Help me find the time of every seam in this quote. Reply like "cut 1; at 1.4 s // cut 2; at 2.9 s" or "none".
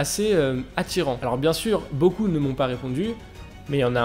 cut 1; at 1.2 s